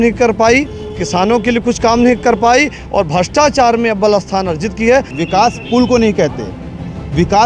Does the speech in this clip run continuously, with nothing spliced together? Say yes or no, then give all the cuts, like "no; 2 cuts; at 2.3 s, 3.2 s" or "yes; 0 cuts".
no; 1 cut; at 5.2 s